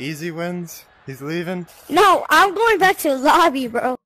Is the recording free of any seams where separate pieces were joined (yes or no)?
yes